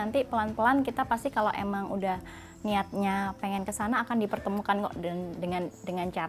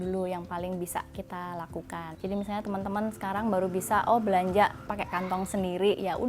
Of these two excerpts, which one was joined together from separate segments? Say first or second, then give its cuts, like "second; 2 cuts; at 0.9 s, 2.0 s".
second; 2 cuts; at 2.1 s, 4.8 s